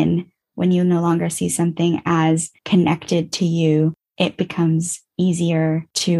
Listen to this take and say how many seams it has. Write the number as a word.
one